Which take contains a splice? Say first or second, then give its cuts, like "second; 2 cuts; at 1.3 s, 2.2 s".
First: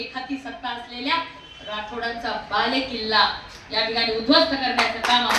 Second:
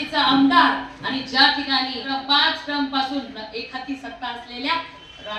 second; 1 cut; at 2.0 s